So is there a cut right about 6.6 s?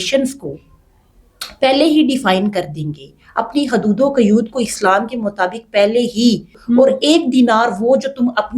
yes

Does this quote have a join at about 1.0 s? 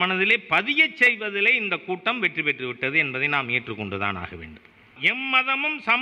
no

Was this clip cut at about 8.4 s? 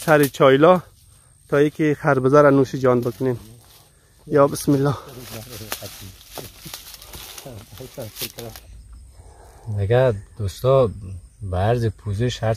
yes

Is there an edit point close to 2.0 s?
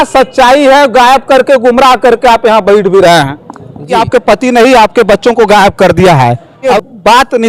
no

